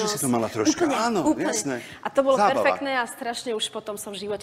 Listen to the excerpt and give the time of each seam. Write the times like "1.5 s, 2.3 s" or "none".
none